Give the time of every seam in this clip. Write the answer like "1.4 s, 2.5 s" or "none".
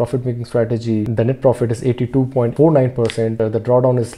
1.1 s, 2.5 s, 3.3 s